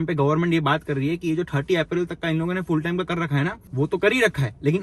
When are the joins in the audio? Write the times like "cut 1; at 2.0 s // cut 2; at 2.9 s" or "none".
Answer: none